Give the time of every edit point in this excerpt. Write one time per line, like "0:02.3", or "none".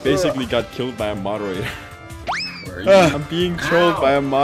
0:02.1
0:03.2